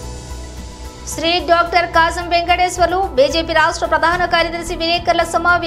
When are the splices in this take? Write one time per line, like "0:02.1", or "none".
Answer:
none